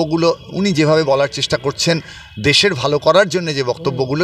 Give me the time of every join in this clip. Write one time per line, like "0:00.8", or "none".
none